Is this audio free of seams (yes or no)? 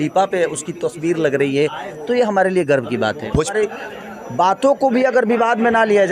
no